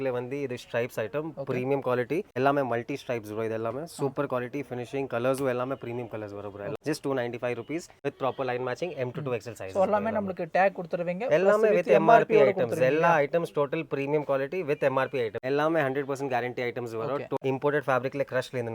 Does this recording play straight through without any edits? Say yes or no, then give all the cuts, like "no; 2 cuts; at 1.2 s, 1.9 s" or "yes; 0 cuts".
no; 5 cuts; at 2.3 s, 6.7 s, 7.9 s, 15.4 s, 17.4 s